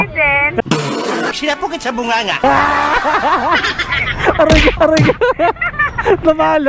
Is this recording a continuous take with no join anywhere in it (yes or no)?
yes